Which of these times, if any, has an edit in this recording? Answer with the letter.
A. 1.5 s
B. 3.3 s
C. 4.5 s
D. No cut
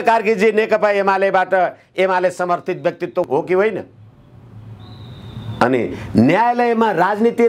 B